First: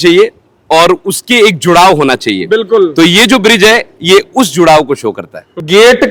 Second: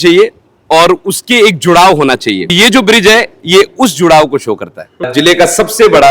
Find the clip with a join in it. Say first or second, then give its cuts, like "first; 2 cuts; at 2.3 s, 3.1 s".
second; 2 cuts; at 2.5 s, 5.0 s